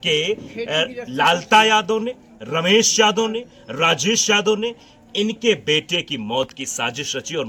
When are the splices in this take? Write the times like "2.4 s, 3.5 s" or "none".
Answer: none